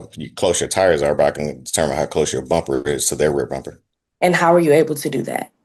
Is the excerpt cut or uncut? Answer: uncut